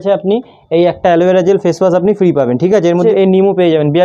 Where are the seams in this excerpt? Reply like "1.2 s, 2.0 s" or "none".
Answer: 3.0 s